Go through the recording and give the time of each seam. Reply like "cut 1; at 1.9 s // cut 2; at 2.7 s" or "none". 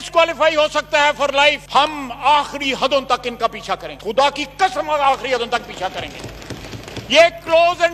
none